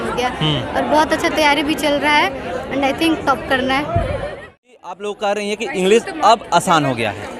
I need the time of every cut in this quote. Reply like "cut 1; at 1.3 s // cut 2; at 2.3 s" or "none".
cut 1; at 4.4 s